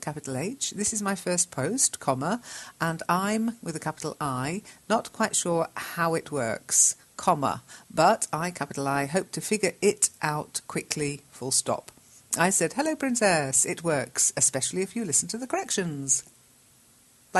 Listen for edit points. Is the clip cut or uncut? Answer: uncut